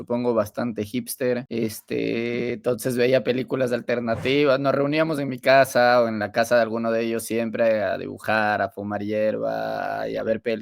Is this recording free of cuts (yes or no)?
no